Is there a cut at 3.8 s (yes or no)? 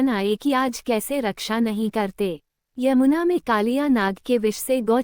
no